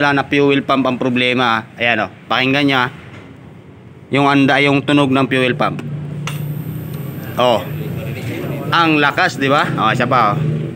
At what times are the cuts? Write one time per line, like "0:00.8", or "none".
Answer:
none